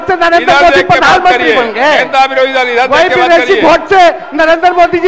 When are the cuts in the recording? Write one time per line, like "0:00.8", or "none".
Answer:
none